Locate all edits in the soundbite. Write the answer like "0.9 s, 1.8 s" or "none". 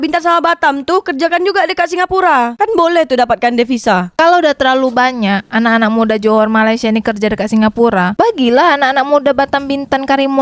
4.1 s